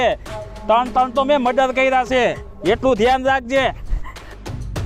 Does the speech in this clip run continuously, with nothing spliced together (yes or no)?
yes